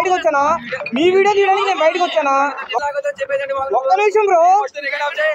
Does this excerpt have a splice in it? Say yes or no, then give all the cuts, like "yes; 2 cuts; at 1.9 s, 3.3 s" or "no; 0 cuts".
yes; 1 cut; at 2.7 s